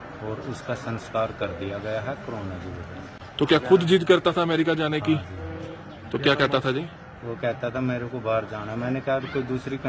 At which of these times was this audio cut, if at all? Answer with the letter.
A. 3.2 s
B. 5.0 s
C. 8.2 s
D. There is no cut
A